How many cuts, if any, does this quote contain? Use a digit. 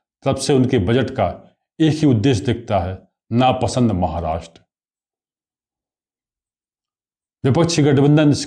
0